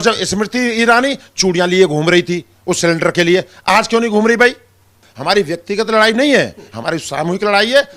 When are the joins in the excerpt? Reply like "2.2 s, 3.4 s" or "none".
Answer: 5.1 s

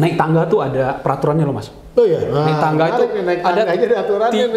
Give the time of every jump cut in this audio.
none

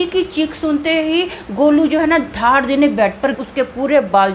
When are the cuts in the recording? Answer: 3.4 s

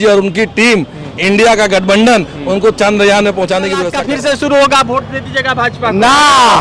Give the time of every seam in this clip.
3.9 s

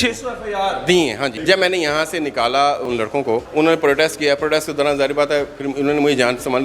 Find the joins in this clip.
1.4 s, 3.3 s

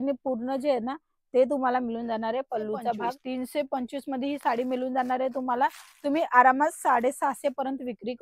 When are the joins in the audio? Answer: 3.2 s

